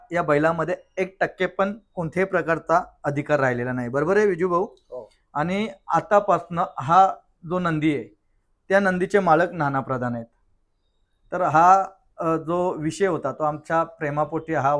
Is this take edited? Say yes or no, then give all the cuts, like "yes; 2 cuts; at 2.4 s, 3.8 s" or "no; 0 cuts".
no; 0 cuts